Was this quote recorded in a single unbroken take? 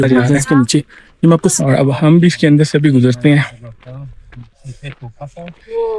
no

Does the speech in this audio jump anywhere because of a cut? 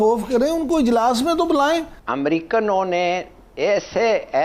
yes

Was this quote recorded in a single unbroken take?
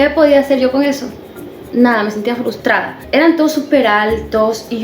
no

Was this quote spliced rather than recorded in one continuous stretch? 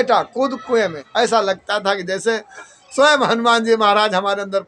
yes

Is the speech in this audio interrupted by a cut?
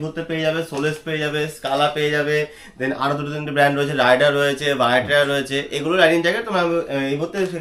no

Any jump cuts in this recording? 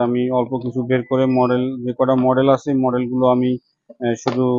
no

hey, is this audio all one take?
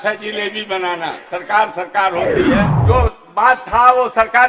no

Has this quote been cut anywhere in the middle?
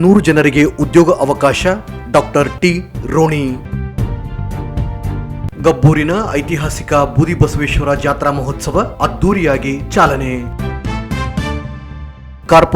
yes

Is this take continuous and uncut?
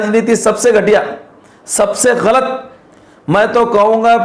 yes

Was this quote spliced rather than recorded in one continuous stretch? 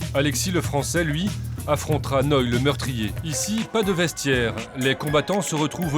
yes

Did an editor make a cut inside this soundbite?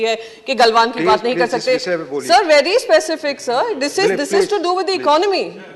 no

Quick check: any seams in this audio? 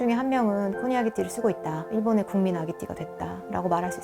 no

